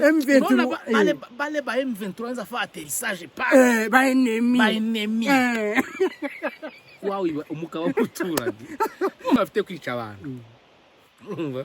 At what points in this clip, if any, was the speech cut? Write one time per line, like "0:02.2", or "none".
0:09.4